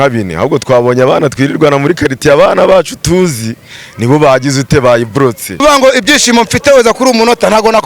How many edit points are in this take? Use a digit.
1